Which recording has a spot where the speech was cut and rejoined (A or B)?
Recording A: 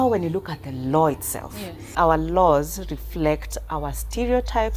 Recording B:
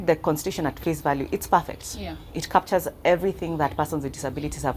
A